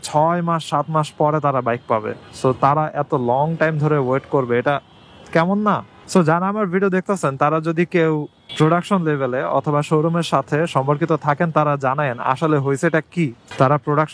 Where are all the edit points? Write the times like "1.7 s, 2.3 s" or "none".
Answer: 5.9 s